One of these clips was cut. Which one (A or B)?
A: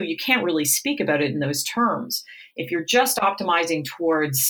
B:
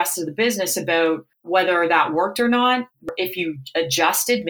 B